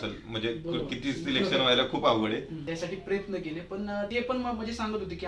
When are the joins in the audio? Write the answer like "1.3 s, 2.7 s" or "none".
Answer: 2.6 s, 4.1 s